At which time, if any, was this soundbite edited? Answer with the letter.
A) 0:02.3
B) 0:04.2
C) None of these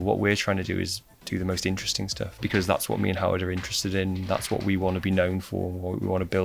A